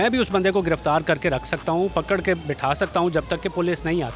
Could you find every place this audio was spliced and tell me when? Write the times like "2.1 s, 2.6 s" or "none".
none